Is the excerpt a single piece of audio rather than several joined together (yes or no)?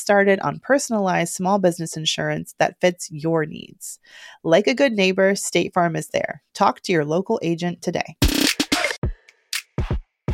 no